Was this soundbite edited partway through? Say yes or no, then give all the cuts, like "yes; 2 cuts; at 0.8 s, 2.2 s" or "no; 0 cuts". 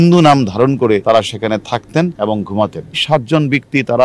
yes; 3 cuts; at 1.0 s, 2.1 s, 3.0 s